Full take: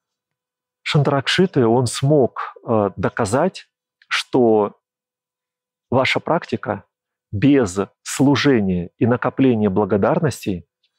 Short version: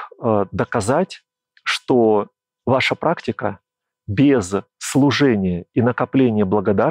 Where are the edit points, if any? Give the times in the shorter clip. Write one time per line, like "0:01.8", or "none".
0:02.4